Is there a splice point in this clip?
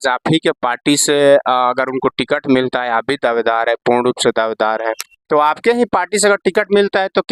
no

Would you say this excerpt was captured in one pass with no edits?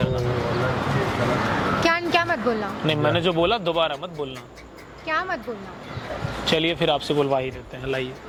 yes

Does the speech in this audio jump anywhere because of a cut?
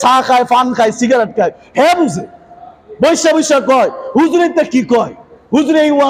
no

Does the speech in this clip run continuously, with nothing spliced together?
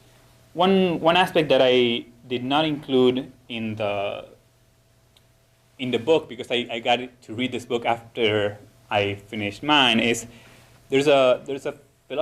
no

